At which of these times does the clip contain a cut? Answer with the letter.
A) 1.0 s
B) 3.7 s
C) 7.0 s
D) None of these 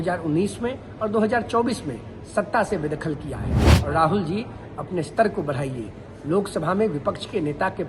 B